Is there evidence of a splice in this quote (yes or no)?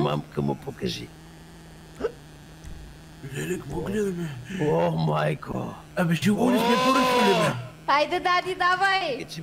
no